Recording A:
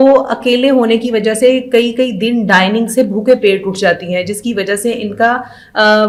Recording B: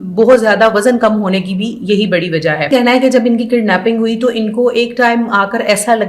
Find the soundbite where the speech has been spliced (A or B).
B